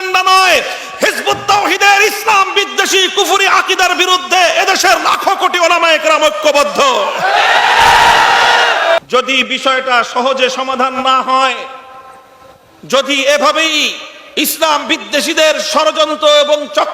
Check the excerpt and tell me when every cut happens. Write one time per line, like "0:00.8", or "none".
0:09.0